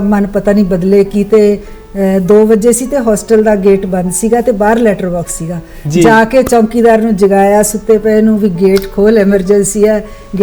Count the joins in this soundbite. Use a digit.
0